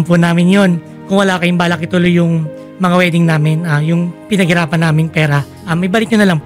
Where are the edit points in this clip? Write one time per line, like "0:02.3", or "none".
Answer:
0:00.9
0:05.5